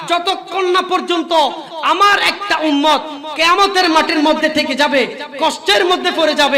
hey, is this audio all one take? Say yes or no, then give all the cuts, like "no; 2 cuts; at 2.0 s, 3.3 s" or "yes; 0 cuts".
yes; 0 cuts